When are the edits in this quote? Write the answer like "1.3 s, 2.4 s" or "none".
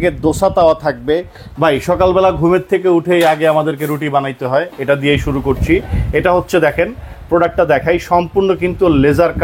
1.4 s